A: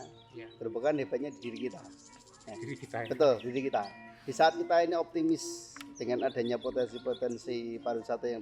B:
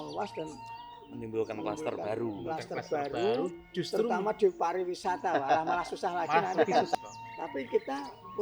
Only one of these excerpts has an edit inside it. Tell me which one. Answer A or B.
B